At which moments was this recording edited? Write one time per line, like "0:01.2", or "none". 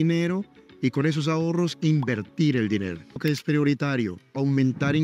0:03.2